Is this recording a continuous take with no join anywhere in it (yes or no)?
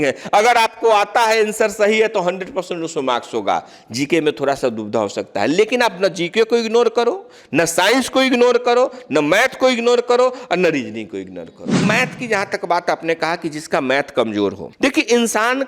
no